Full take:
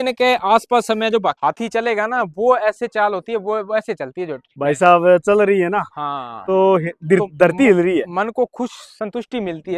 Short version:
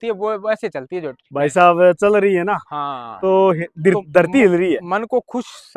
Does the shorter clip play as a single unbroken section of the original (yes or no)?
yes